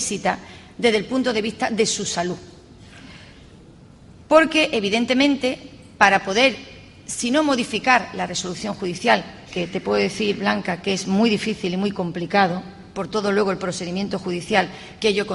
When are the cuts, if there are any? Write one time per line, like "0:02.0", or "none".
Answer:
0:13.3